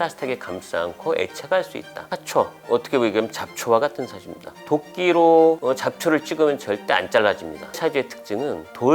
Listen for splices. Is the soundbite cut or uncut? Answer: cut